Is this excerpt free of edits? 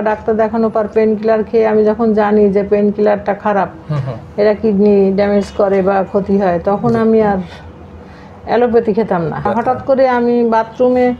no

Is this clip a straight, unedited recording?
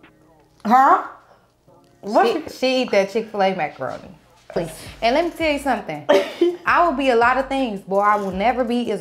no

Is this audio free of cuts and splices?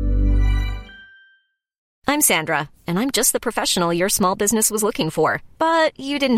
no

